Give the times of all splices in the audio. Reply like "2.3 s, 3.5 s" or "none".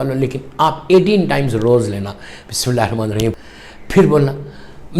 3.4 s